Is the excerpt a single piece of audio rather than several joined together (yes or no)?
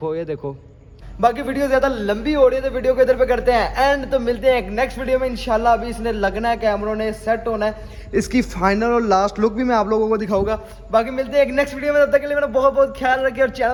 yes